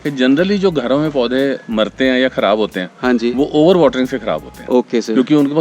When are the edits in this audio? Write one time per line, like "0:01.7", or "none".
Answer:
none

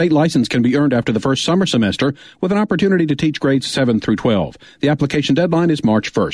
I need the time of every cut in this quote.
none

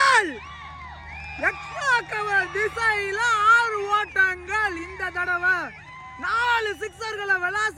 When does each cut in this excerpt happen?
none

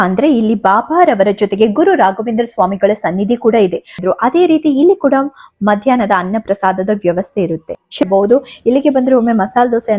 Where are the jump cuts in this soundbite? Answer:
0:04.0
0:08.0

